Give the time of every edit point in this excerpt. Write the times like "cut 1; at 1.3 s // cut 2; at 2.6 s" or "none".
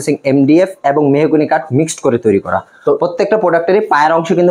none